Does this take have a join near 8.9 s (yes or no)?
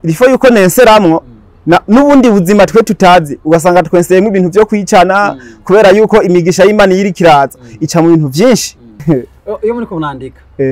yes